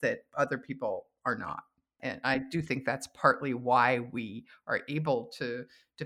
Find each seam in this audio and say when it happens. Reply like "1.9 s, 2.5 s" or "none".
2.0 s